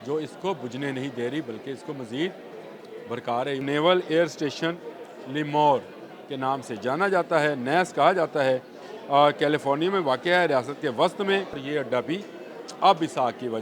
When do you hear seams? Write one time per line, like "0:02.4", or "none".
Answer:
0:03.6
0:11.6